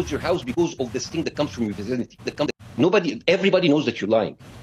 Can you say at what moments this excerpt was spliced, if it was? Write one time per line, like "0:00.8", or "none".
0:02.1